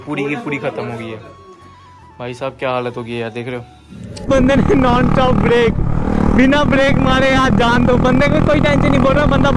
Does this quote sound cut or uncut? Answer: cut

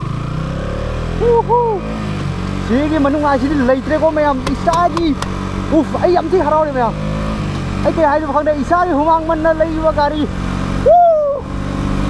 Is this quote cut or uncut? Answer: uncut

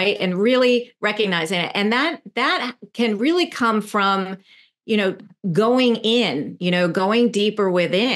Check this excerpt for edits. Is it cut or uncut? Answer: uncut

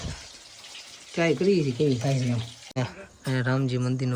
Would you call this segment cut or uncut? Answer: cut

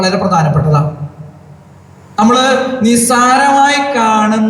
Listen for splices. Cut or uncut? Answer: uncut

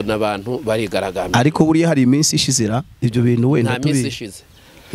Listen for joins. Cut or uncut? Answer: uncut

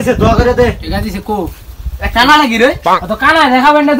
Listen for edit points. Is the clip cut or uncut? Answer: uncut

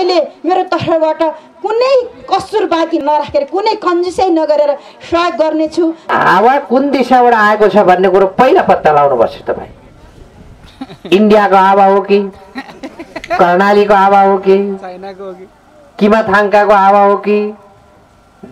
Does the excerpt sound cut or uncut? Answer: cut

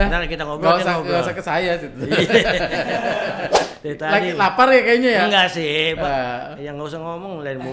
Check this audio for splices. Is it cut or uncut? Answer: cut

